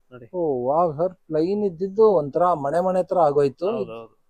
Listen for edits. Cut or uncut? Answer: uncut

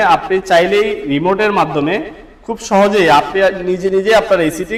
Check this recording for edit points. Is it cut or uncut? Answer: uncut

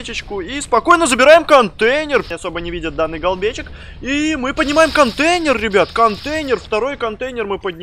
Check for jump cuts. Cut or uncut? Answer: cut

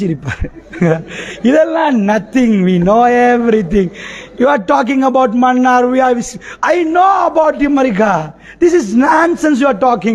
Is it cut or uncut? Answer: uncut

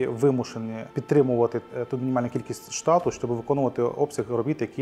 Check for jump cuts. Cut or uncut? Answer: uncut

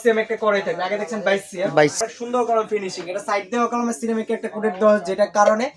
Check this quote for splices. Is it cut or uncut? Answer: cut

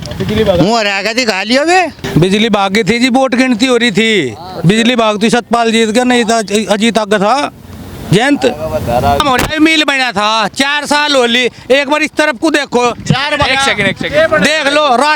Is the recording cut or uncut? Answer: cut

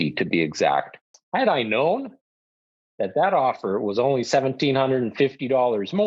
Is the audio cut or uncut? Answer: cut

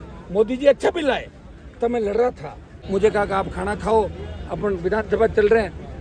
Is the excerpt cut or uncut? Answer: cut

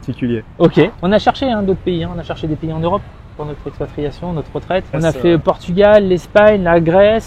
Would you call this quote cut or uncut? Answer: cut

